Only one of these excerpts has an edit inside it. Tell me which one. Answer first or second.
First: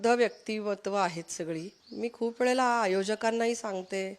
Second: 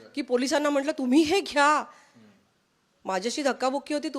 first